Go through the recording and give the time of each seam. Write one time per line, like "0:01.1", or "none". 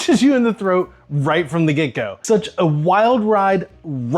0:02.2